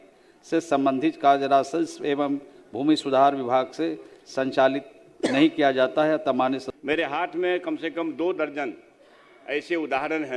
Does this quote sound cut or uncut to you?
cut